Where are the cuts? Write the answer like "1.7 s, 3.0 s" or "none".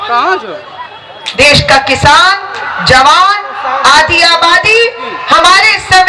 none